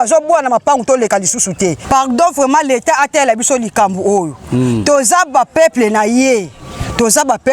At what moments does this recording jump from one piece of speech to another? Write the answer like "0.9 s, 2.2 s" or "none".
1.8 s

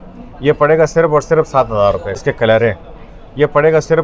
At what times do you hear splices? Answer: 2.2 s

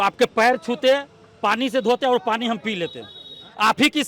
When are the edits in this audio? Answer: none

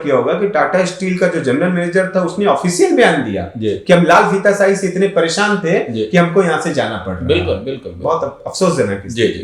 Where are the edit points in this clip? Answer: none

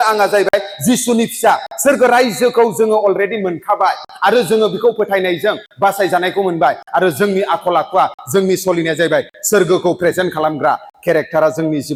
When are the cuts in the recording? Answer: none

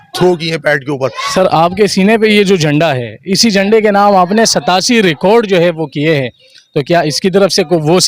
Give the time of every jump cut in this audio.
1.2 s

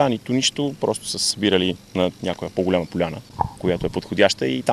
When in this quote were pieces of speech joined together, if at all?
3.2 s

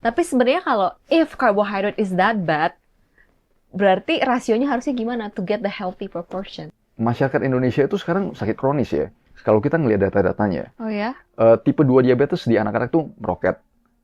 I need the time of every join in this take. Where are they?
6.5 s

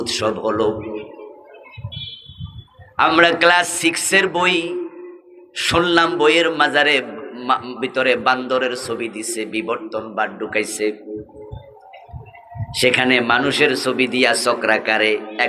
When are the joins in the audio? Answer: none

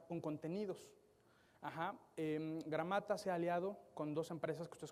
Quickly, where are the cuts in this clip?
none

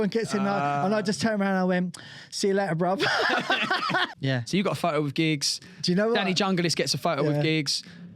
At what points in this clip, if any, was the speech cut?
4.1 s

